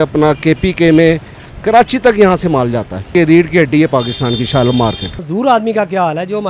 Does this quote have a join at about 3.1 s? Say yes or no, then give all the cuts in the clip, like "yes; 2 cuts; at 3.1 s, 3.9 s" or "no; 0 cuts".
yes; 2 cuts; at 3.1 s, 5.2 s